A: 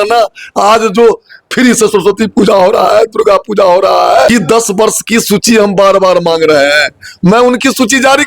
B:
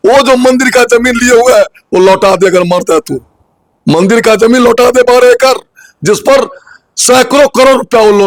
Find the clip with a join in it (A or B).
A